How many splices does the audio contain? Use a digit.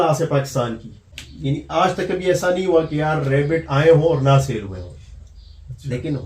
1